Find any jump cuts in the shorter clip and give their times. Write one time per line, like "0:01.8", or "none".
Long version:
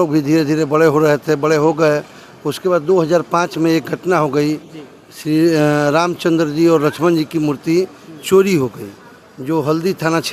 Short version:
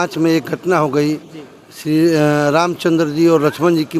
none